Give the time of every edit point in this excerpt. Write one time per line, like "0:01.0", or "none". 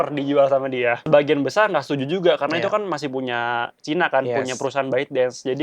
0:01.0